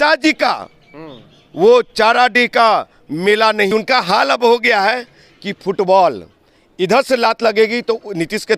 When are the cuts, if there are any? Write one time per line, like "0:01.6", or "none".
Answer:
0:03.7